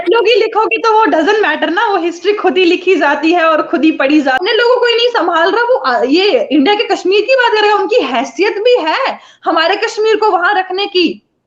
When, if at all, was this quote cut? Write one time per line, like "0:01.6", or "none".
0:04.4